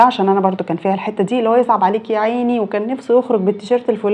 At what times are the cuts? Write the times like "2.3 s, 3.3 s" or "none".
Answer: none